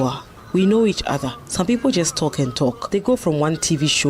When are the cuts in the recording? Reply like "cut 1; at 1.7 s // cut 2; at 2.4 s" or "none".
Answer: cut 1; at 2.8 s